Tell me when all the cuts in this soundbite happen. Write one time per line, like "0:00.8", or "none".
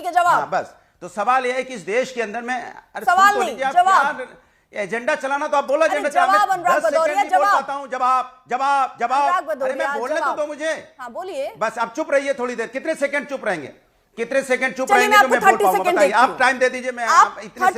none